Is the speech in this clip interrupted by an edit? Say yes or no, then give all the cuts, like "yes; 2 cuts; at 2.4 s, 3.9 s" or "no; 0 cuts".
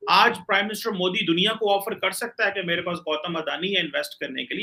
no; 0 cuts